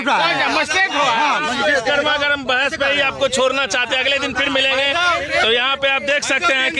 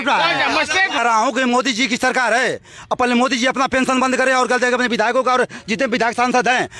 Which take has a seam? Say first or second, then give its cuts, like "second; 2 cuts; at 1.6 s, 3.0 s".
second; 1 cut; at 1.0 s